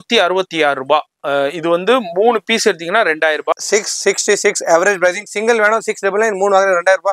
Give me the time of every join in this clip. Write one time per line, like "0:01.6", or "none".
0:03.5